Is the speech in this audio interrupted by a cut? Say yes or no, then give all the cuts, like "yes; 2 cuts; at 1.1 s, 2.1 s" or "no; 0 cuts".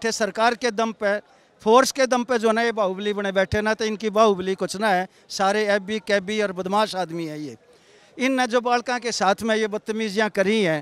no; 0 cuts